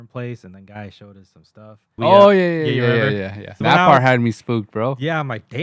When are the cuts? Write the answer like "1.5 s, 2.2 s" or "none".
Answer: 2.0 s, 3.6 s